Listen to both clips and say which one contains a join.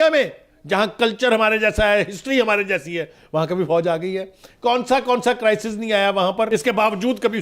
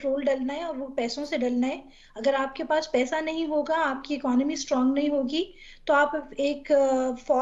first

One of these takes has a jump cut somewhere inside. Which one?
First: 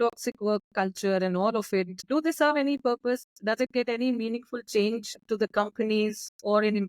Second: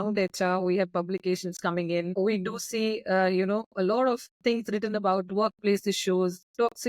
first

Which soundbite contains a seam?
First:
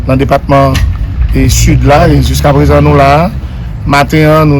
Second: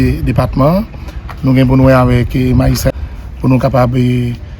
second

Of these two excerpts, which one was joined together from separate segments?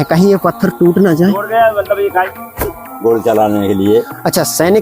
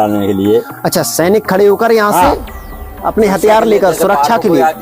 first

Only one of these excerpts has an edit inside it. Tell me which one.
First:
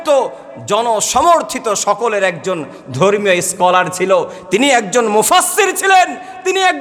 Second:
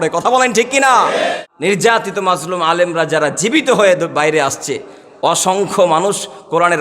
second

